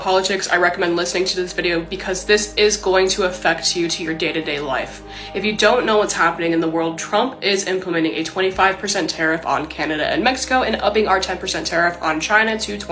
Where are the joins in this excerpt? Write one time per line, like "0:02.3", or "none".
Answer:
none